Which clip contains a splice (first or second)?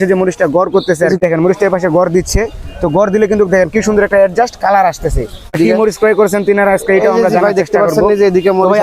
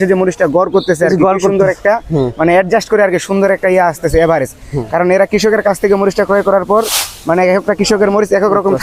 first